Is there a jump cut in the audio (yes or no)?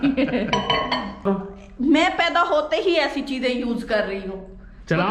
yes